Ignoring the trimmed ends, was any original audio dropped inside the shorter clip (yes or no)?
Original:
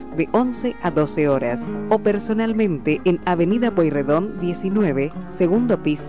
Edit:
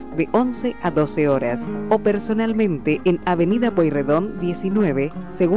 no